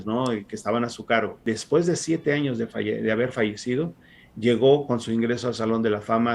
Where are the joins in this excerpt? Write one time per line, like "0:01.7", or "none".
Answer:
0:01.4